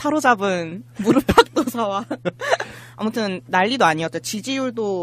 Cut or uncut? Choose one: uncut